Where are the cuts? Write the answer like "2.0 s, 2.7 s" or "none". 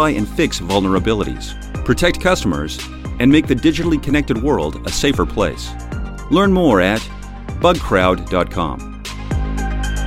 9.0 s